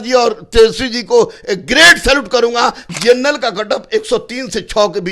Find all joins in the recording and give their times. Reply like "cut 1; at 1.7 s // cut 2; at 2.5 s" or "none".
cut 1; at 2.8 s